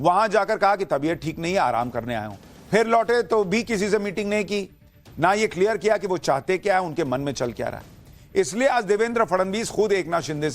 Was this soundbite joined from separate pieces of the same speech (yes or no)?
yes